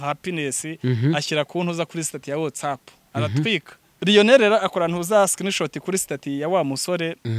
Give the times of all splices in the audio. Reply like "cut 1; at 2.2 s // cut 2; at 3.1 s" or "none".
cut 1; at 4.0 s